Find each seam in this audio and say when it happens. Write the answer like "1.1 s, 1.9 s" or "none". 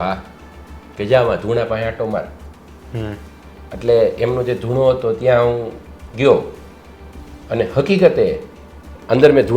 none